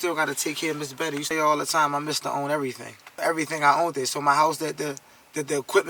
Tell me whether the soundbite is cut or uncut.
cut